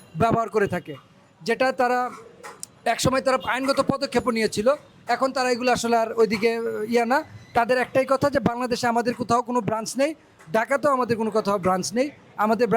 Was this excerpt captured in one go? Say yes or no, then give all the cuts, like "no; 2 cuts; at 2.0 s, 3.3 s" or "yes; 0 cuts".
yes; 0 cuts